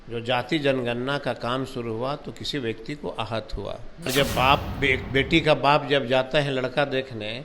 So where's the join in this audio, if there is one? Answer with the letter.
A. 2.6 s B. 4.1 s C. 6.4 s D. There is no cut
B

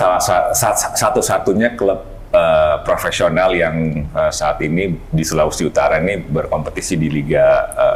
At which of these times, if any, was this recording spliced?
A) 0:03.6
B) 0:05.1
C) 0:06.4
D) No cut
D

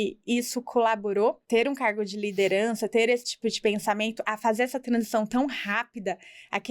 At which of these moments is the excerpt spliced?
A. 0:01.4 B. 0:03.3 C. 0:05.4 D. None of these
A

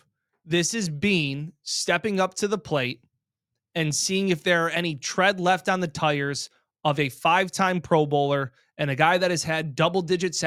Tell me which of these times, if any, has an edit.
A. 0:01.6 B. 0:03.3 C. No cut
C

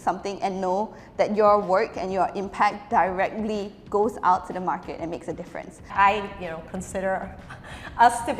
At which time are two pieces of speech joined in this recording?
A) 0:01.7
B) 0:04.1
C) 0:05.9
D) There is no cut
C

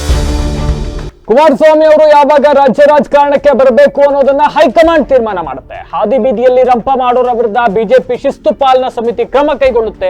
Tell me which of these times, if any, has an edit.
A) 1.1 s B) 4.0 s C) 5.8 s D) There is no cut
A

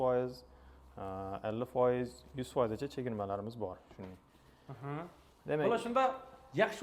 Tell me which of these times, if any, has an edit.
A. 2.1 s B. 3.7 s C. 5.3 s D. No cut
D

